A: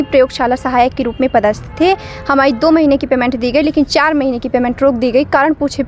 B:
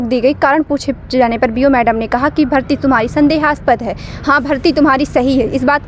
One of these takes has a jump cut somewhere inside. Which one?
B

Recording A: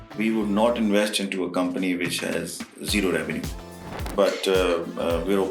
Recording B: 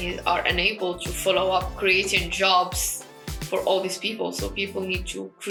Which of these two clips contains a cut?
A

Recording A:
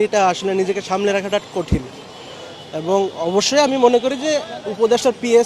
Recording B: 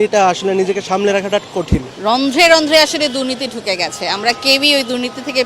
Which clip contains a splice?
B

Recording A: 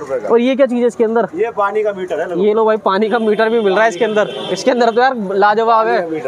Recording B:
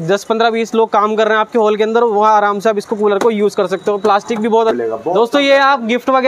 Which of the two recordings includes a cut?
B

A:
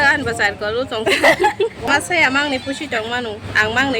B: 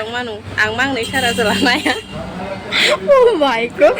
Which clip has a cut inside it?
A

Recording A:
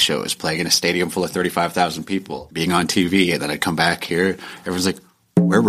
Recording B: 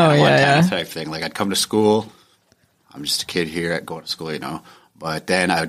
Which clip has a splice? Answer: A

